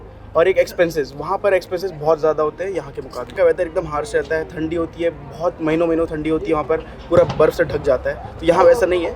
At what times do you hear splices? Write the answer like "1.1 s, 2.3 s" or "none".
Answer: 3.3 s